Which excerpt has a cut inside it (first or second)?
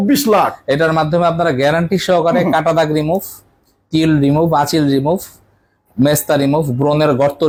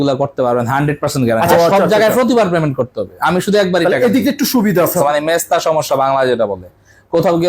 second